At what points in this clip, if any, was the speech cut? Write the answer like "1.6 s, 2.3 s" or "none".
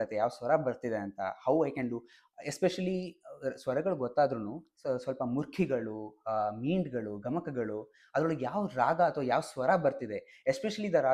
none